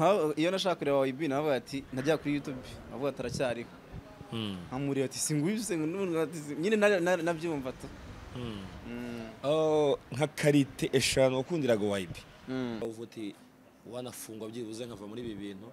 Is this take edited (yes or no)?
yes